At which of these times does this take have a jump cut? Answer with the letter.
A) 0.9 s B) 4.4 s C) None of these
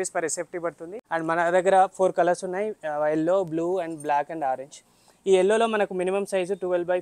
A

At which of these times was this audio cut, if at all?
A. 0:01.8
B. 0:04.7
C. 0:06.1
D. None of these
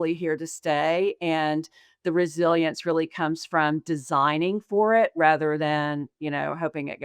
D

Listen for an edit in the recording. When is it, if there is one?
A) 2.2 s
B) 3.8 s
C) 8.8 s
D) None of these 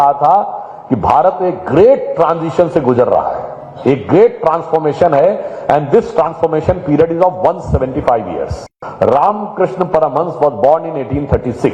C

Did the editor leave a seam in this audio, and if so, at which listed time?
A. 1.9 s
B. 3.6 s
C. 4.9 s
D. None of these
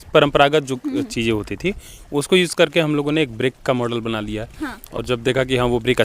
D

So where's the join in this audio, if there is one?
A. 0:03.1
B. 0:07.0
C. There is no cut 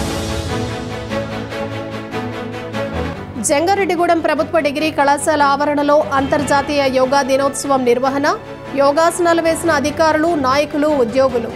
A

